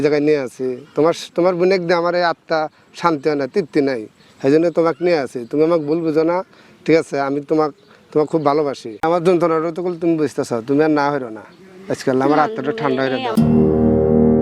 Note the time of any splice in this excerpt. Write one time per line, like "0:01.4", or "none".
0:08.9
0:13.3